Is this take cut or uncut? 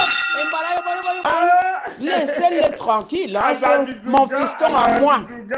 cut